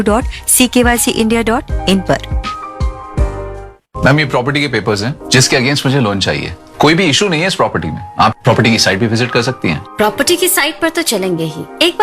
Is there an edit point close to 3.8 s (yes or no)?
yes